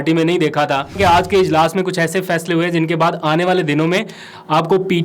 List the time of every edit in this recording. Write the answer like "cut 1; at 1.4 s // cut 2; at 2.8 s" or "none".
cut 1; at 1.0 s